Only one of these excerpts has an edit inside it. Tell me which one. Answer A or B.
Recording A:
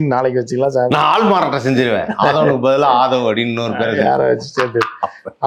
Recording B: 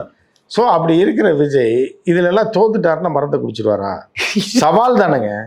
B